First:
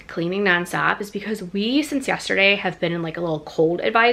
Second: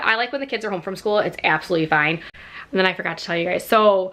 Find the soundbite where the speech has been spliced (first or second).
second